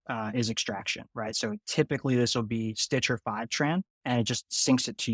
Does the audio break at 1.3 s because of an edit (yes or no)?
no